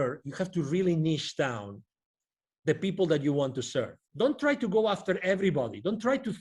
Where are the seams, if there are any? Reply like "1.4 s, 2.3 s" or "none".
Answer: 4.0 s

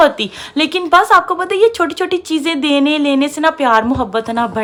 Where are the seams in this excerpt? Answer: none

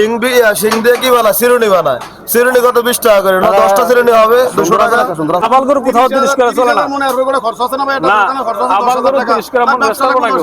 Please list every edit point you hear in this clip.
5.4 s

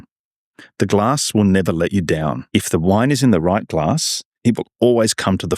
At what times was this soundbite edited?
2.4 s

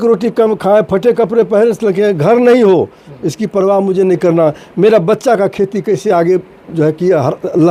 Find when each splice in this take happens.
none

